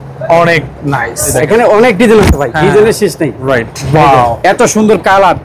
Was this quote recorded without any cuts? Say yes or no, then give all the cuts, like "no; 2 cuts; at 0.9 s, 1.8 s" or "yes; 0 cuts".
no; 2 cuts; at 1.2 s, 3.8 s